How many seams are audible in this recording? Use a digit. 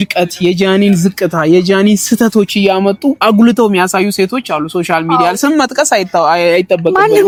0